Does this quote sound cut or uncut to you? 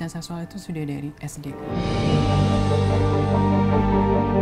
uncut